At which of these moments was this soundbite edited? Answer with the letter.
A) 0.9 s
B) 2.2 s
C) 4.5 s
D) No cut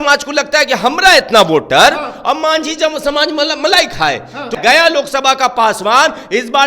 C